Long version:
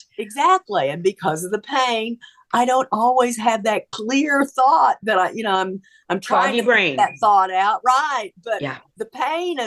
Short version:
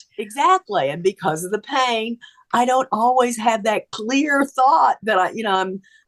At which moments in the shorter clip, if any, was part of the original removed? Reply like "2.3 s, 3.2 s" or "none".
none

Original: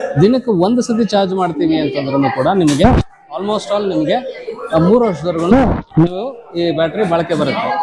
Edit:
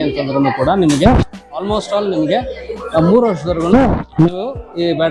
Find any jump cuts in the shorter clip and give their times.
none

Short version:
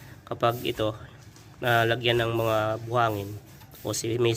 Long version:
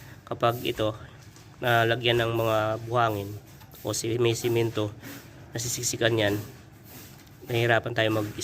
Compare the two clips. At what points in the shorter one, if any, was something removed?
none

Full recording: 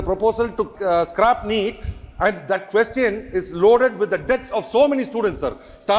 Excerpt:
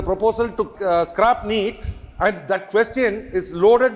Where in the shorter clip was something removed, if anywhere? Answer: none

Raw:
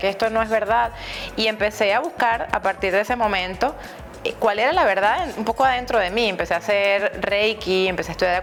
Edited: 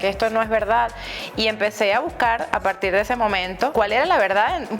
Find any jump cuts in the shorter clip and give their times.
3.7 s

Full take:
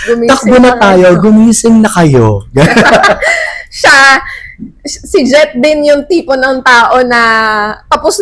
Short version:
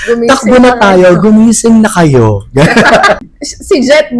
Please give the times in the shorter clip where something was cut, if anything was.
3.3 s

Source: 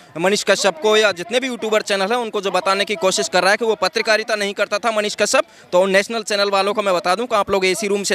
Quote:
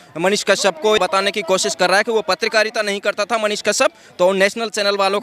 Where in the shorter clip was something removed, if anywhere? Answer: 1.0 s

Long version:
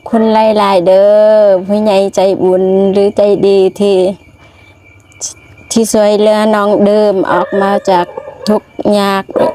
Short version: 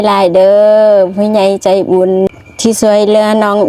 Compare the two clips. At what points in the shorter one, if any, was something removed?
2.3 s

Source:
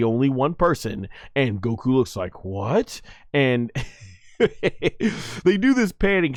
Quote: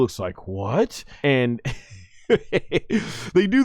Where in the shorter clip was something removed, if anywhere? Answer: 1.0 s

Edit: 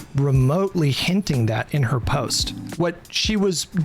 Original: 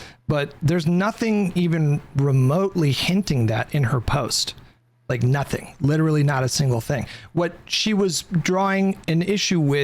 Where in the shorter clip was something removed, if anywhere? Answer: 2.6 s

